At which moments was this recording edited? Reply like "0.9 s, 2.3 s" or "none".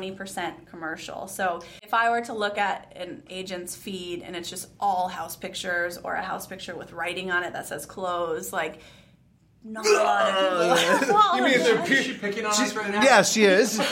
1.7 s

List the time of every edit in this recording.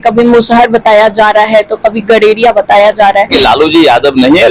3.3 s

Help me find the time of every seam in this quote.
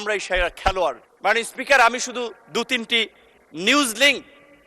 1.1 s

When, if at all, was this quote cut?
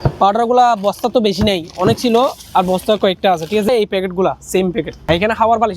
3.7 s, 5.0 s

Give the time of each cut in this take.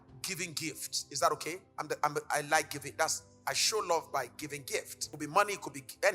1.7 s, 5.0 s

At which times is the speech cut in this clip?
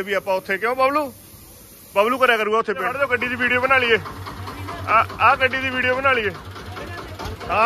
2.9 s

